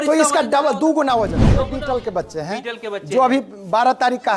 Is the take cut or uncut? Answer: cut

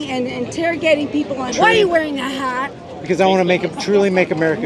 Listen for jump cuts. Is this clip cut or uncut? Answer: cut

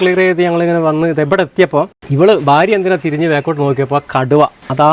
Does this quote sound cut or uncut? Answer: cut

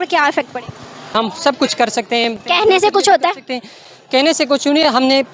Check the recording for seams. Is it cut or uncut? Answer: cut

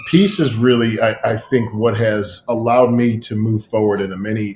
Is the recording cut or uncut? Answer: uncut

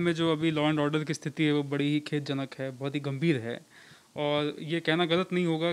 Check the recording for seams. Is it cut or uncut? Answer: uncut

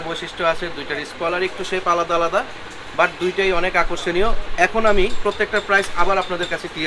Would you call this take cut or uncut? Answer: uncut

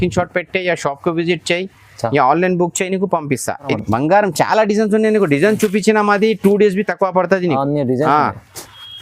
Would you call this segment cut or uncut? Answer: cut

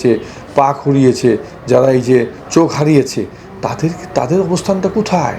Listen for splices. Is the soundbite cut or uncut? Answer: uncut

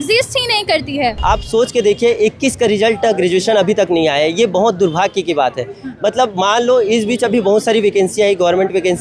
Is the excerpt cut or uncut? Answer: cut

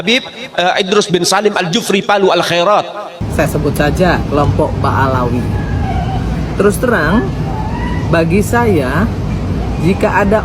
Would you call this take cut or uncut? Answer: cut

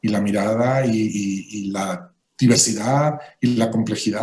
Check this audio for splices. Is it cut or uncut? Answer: uncut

